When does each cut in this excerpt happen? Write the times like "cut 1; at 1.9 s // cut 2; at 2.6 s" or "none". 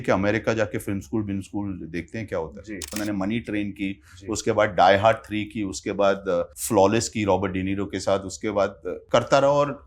cut 1; at 3.0 s // cut 2; at 6.6 s // cut 3; at 8.9 s